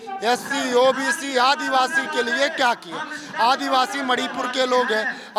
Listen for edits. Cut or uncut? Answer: uncut